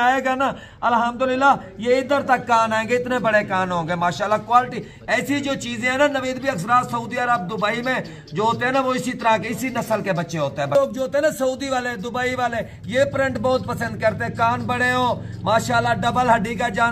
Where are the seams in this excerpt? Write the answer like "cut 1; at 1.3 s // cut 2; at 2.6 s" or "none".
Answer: none